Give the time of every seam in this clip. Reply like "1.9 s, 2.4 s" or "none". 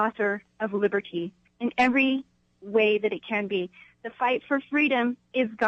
1.4 s, 3.8 s